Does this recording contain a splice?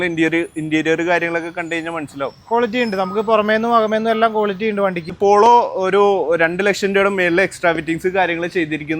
yes; 1 cut; at 5.0 s

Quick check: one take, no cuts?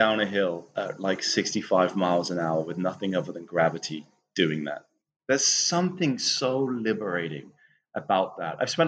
yes; 0 cuts

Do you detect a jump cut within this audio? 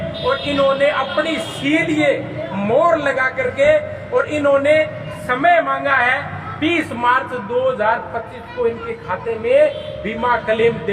no; 0 cuts

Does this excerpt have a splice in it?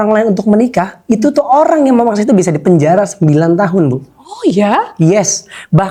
no; 0 cuts

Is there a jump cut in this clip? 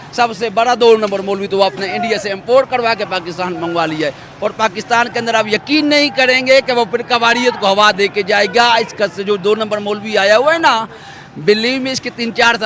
no; 0 cuts

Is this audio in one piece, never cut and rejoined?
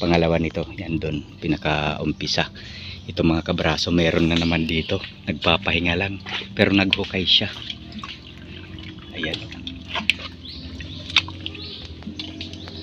yes; 0 cuts

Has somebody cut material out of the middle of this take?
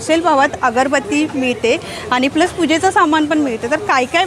no; 0 cuts

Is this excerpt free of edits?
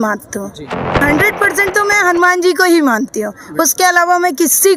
no; 1 cut; at 1.0 s

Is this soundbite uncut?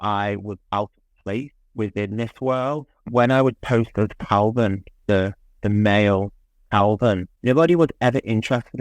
no; 1 cut; at 3.0 s

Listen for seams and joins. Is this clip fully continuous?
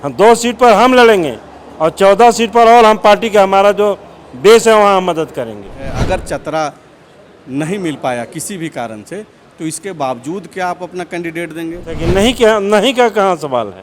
no; 2 cuts; at 6.0 s, 11.9 s

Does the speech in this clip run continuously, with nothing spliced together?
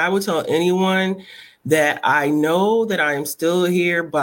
yes; 0 cuts

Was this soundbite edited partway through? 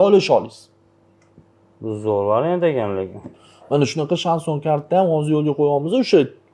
no; 0 cuts

